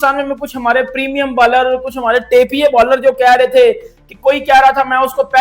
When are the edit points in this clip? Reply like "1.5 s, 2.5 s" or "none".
none